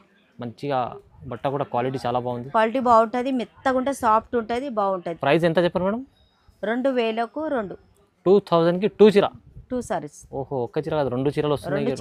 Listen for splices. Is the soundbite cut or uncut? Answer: uncut